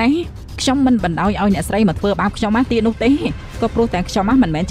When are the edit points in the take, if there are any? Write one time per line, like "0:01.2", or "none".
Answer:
none